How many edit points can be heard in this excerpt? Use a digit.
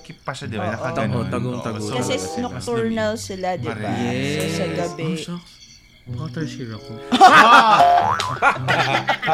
0